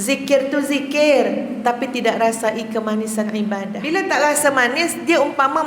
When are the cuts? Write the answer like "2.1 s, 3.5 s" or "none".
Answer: 3.8 s